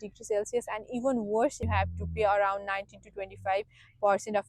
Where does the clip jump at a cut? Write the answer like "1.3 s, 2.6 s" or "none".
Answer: 1.6 s